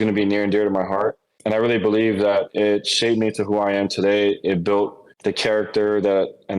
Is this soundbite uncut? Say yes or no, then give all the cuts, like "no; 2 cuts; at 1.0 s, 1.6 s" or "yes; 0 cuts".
no; 2 cuts; at 1.3 s, 5.1 s